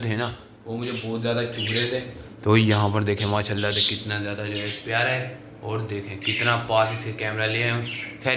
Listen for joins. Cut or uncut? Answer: uncut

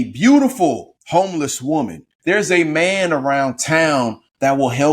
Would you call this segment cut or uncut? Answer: cut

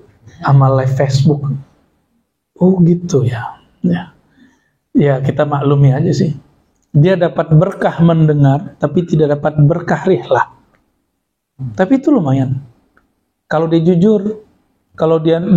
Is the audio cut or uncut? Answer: uncut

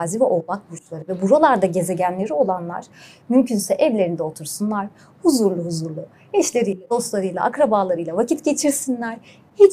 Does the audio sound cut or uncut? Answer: uncut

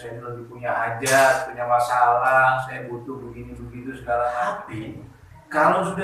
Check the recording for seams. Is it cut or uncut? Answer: cut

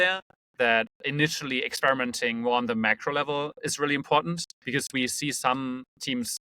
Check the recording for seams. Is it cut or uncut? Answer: cut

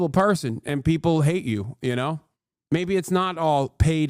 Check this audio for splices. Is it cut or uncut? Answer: uncut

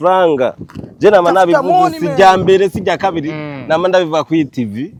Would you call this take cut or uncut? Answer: uncut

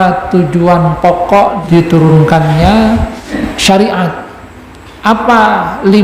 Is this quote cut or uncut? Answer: cut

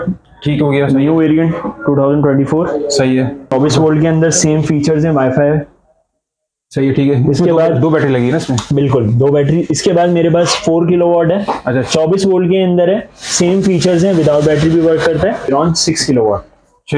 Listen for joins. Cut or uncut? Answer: cut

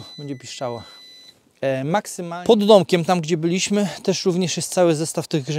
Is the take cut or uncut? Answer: cut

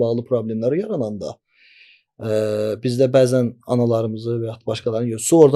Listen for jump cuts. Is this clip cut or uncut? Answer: uncut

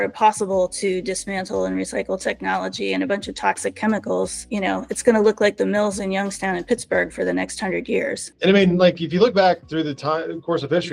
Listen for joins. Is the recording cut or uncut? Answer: uncut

